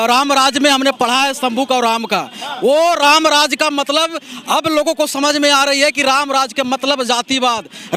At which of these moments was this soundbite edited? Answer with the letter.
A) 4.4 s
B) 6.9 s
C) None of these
C